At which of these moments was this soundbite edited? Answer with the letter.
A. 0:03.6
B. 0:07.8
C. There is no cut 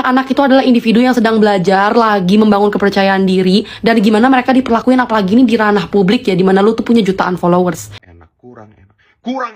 B